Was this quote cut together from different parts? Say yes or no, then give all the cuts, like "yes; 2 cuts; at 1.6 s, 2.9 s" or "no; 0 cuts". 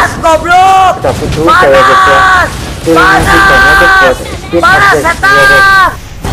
no; 0 cuts